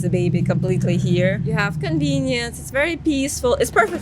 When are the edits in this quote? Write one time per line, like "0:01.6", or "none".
0:01.4